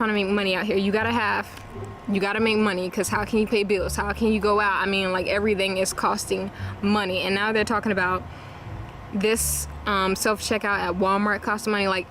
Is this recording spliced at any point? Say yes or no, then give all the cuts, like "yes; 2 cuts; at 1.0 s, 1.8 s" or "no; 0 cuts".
no; 0 cuts